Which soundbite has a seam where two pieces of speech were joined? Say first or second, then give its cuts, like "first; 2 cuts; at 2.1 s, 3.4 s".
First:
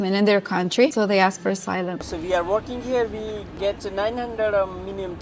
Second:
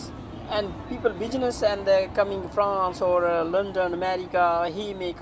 first; 3 cuts; at 0.9 s, 2.0 s, 3.5 s